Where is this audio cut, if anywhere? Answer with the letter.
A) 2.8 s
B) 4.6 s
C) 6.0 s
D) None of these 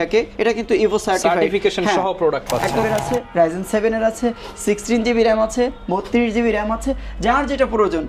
A